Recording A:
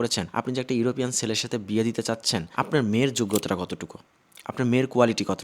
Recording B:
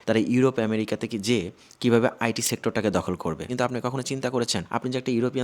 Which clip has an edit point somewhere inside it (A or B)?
B